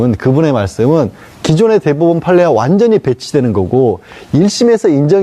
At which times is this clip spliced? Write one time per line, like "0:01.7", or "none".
none